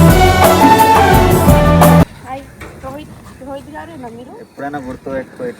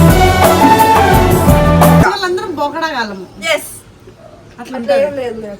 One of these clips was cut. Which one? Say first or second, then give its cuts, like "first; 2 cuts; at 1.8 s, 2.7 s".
first; 1 cut; at 2.0 s